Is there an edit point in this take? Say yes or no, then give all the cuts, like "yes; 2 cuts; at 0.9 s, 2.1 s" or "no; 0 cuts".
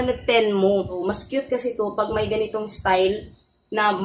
yes; 1 cut; at 1.1 s